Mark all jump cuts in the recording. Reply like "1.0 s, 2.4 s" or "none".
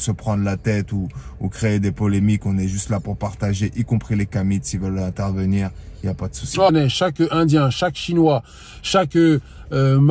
6.7 s